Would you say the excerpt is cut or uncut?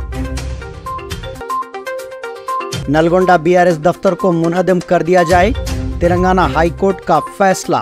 uncut